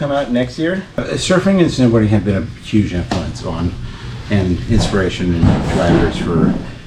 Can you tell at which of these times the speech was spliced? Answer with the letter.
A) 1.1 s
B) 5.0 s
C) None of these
A